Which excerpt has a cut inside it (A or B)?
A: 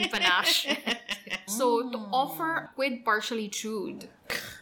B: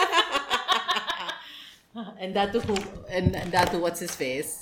A